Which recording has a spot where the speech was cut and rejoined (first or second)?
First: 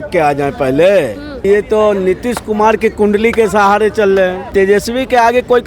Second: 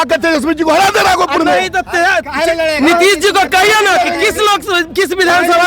first